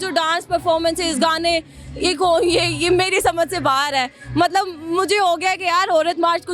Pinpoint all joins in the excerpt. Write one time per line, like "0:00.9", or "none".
none